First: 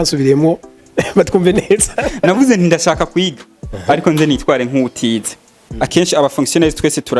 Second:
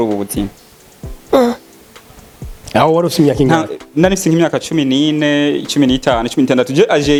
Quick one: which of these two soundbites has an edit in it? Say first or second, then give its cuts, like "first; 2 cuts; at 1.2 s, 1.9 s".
first; 1 cut; at 5.6 s